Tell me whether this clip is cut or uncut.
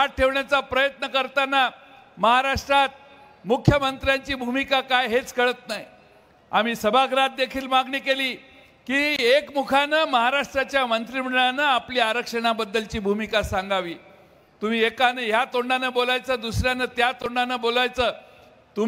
uncut